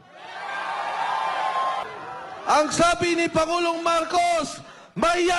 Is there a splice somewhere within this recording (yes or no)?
yes